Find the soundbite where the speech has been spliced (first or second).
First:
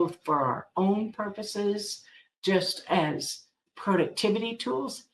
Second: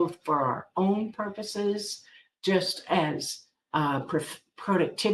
first